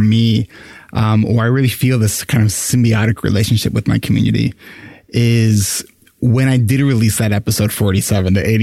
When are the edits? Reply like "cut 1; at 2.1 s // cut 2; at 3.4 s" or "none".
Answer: none